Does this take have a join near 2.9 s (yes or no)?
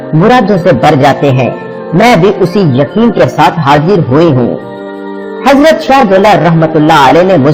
yes